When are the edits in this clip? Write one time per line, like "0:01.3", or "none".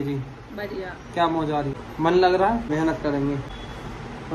0:01.8
0:02.7
0:03.5